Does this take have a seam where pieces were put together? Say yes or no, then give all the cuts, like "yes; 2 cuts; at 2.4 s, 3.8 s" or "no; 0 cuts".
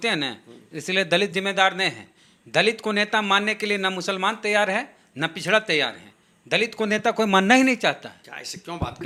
no; 0 cuts